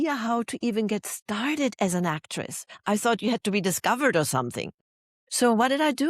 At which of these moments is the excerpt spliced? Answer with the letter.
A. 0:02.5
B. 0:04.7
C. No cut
B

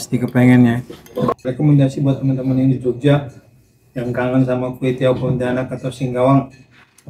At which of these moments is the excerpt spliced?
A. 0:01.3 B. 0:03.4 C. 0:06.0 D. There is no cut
A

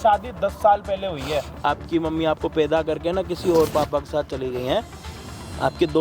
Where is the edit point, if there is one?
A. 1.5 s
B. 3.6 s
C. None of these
A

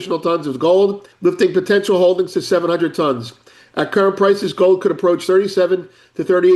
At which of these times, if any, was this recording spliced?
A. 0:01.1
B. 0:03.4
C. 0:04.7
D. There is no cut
A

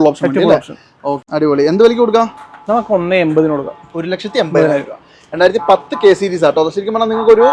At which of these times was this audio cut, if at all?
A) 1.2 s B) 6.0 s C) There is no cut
A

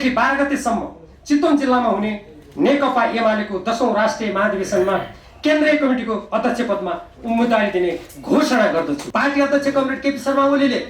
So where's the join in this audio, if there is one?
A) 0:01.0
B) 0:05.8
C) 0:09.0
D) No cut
C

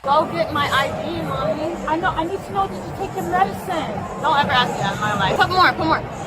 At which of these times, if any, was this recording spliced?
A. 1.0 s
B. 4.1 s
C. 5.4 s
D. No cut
C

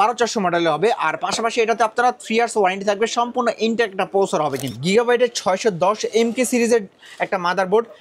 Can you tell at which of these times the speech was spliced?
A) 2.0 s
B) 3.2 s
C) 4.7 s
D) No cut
C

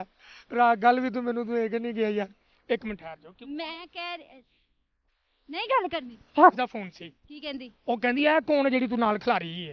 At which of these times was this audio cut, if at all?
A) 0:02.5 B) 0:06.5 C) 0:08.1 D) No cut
B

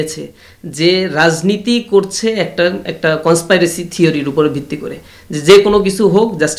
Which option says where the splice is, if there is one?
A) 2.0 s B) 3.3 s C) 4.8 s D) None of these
D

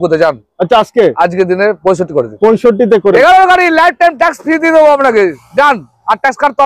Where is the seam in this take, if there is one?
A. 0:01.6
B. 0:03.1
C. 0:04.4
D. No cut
B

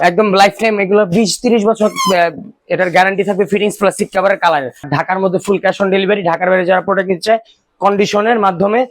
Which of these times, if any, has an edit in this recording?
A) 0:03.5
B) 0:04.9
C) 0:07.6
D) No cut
B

